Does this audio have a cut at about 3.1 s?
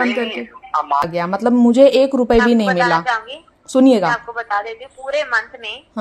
no; 1 cut; at 1.1 s

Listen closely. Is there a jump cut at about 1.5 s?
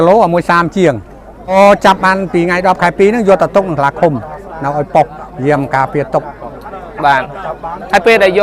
yes; 1 cut; at 1.5 s

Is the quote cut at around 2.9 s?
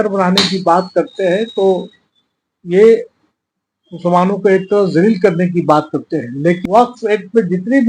no; 1 cut; at 6.6 s

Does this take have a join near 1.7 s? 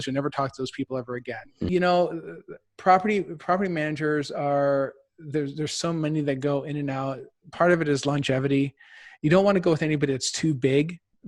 yes; 1 cut; at 1.7 s

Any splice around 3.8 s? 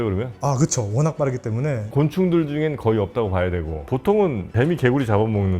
yes; 1 cut; at 3.8 s

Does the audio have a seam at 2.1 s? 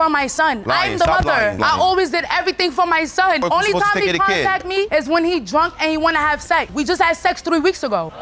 no; 2 cuts; at 3.4 s, 6.7 s

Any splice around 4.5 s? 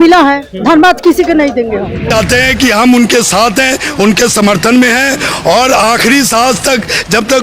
no; 1 cut; at 2.1 s

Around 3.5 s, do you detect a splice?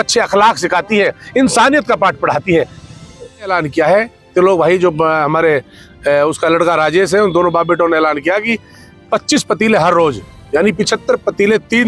yes; 1 cut; at 3.5 s

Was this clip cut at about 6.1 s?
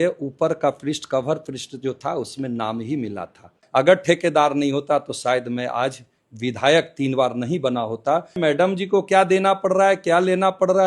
no; 2 cuts; at 3.6 s, 8.4 s

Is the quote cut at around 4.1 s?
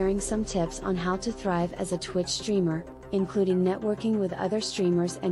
no; 0 cuts

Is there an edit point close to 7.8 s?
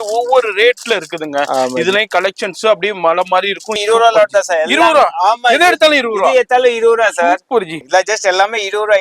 yes; 2 cuts; at 3.8 s, 7.8 s

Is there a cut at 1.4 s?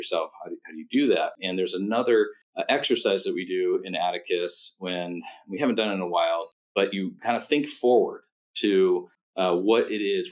yes; 4 cuts; at 1.4 s, 2.5 s, 6.6 s, 9.2 s

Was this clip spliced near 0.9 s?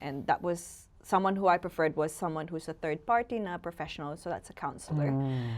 no; 0 cuts

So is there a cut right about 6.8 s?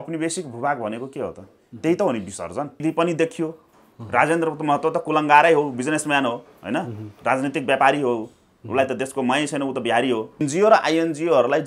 no; 2 cuts; at 2.8 s, 10.4 s

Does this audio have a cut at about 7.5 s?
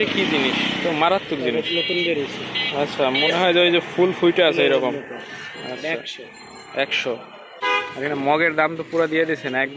yes; 1 cut; at 7.5 s

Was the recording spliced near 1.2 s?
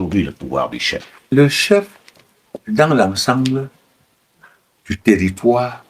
yes; 1 cut; at 1.2 s

